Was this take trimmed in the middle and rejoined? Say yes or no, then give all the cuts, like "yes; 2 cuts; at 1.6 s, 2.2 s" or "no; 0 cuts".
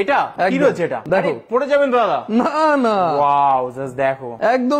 no; 0 cuts